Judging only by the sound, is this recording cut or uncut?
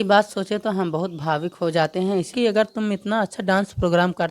cut